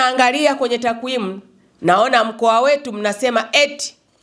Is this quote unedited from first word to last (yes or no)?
yes